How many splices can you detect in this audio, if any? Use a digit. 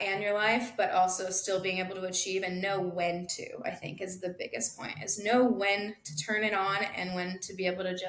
0